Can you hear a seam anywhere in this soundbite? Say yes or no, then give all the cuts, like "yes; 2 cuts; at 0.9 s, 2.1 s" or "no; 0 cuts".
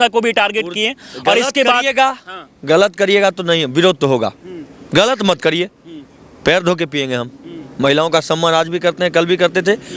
no; 0 cuts